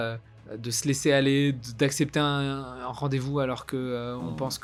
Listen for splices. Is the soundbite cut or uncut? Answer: uncut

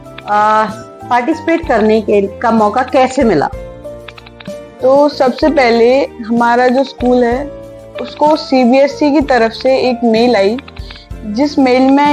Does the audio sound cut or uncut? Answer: uncut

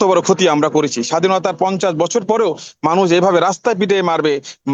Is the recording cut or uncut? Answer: uncut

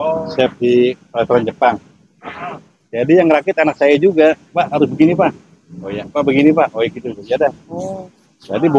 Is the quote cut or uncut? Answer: uncut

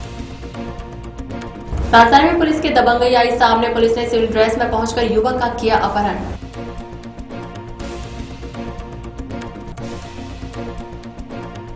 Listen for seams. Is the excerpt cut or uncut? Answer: cut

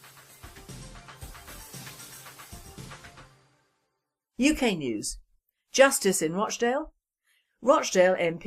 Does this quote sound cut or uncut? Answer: cut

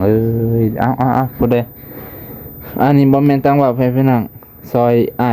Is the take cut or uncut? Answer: uncut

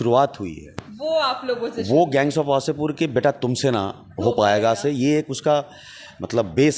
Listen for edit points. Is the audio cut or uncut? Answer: uncut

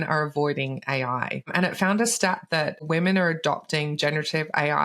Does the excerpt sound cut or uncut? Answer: cut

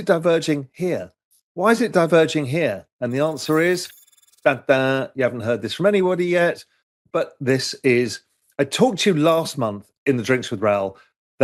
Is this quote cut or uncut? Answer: uncut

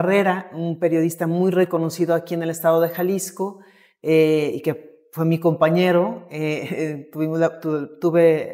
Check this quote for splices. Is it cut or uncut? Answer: uncut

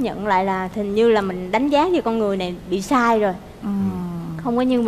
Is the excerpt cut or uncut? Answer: uncut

